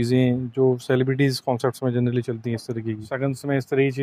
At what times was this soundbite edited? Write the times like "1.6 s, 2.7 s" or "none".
3.1 s